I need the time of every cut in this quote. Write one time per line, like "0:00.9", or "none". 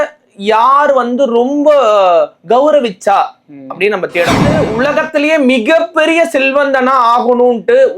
0:04.6